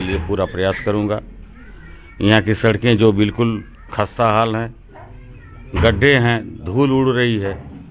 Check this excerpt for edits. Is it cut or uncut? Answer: uncut